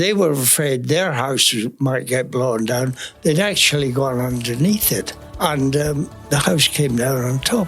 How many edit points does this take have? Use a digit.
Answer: 2